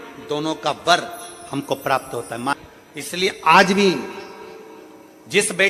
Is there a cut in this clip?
yes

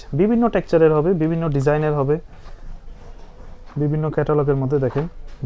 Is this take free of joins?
yes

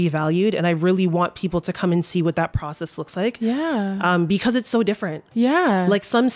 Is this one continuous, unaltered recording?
yes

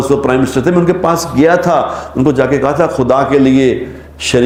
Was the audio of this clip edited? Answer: no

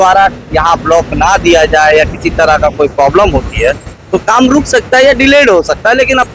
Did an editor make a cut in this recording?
no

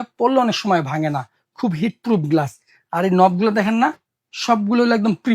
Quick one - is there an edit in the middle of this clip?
no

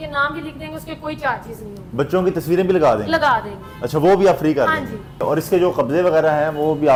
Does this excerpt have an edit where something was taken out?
no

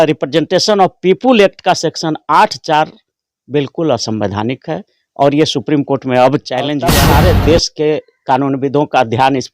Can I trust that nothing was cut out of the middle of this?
no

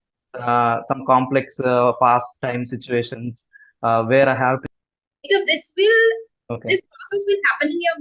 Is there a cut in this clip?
yes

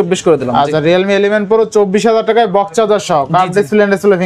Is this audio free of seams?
yes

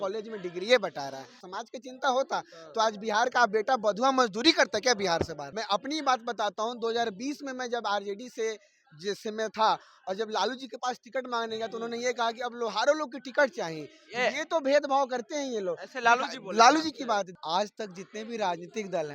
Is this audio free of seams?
no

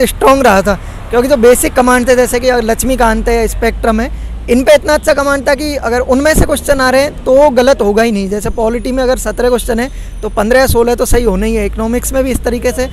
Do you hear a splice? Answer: no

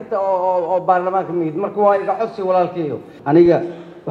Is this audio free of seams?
no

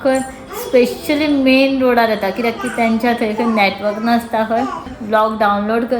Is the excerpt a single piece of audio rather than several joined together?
no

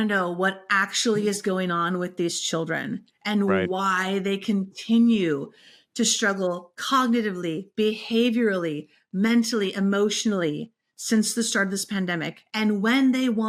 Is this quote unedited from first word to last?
yes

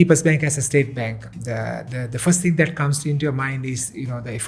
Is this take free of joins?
yes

